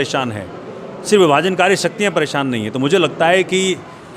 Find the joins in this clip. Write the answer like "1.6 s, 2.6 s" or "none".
none